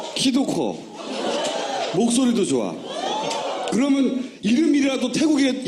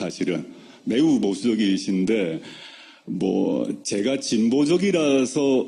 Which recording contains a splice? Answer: second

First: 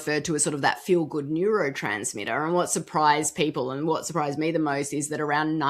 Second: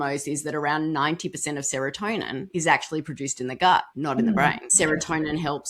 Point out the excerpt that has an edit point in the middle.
second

